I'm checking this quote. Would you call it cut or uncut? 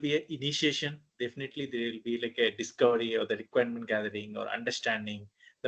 uncut